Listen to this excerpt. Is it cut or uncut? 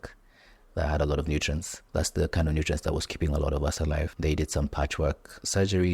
cut